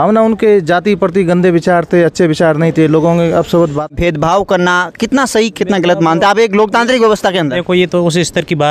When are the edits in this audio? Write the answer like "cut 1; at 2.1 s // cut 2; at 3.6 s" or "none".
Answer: cut 1; at 3.9 s